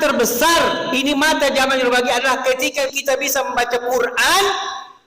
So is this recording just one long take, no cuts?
no; 1 cut; at 2.9 s

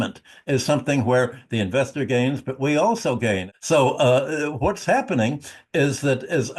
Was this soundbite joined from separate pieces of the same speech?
yes; 1 cut; at 3.5 s

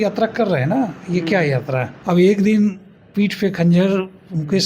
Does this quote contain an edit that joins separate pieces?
yes; 1 cut; at 1.9 s

